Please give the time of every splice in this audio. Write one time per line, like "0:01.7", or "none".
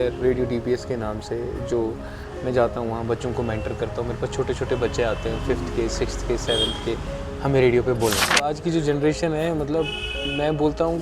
0:08.5